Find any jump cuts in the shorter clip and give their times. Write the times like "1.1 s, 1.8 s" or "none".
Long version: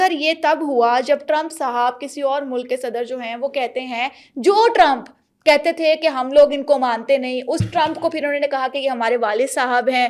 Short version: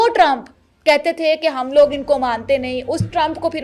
none